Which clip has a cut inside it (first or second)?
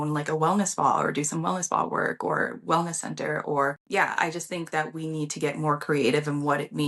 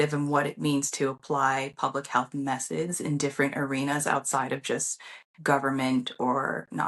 first